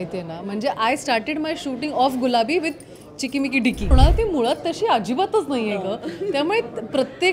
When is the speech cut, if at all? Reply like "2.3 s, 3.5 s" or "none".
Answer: 3.9 s